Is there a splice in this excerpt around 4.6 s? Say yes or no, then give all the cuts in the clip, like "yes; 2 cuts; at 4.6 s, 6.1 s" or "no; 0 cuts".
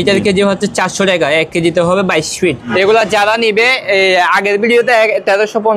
no; 1 cut; at 2.6 s